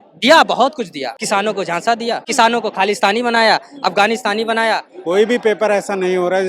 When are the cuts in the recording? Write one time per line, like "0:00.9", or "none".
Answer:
0:01.1
0:02.3
0:04.9